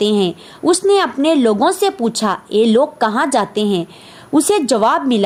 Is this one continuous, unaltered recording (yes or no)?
yes